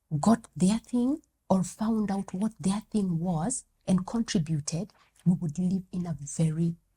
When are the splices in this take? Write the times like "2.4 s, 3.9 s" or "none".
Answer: none